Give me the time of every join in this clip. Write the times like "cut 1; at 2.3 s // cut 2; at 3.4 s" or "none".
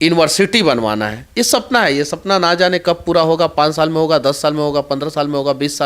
none

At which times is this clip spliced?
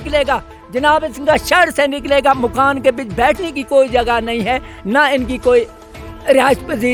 none

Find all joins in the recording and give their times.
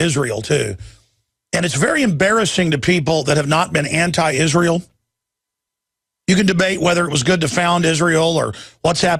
none

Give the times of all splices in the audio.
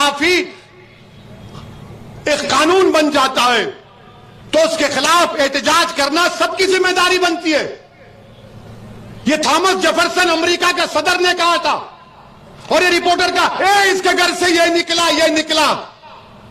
none

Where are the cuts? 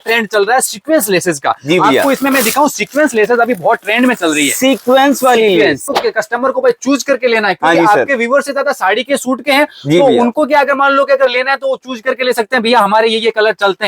cut 1; at 5.9 s

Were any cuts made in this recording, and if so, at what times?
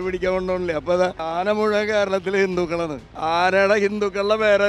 cut 1; at 1.2 s // cut 2; at 3.1 s

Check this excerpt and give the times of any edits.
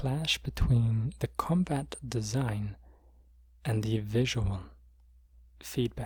none

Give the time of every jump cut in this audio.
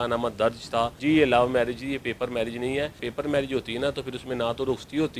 cut 1; at 1.0 s // cut 2; at 3.1 s

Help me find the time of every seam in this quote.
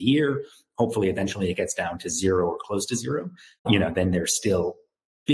cut 1; at 3.6 s

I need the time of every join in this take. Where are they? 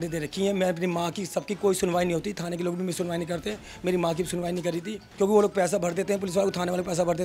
cut 1; at 5.0 s

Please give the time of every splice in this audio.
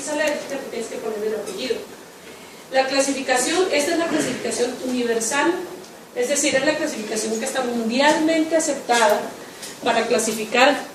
none

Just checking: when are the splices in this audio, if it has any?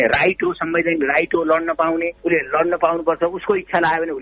cut 1; at 2.1 s

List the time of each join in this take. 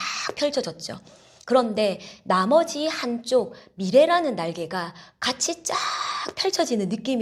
none

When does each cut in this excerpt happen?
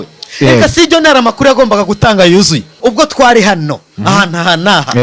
cut 1; at 2.7 s

